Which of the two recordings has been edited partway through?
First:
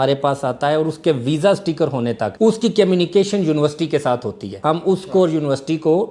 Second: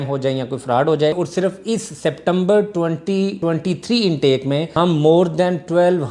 second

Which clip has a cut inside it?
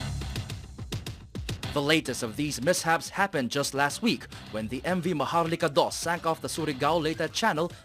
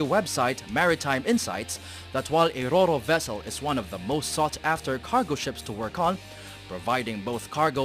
first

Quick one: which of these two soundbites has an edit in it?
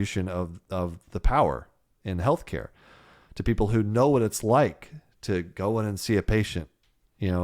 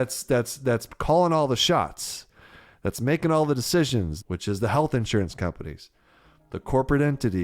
second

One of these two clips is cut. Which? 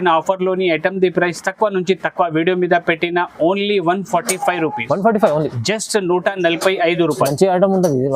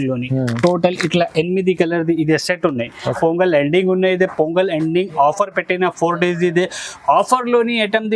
second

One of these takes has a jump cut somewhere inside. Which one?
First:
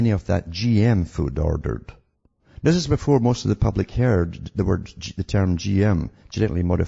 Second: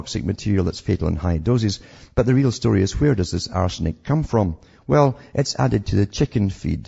first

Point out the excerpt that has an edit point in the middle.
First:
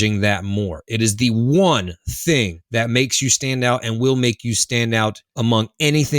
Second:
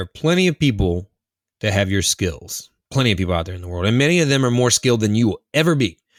first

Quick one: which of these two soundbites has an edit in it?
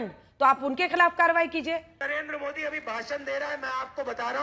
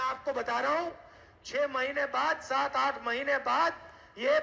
first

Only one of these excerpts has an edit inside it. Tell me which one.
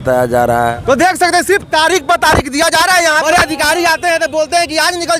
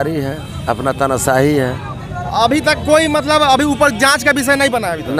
first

